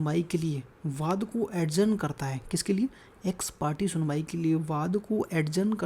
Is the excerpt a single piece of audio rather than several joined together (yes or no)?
yes